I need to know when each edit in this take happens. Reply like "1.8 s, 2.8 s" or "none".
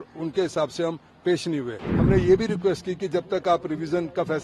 1.9 s